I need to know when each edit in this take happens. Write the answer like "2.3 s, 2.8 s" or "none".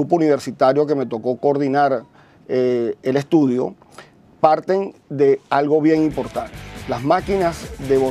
2.3 s